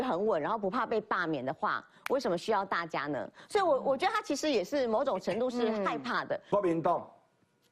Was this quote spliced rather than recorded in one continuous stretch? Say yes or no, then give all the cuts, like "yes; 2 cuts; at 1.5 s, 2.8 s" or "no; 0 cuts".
yes; 1 cut; at 6.4 s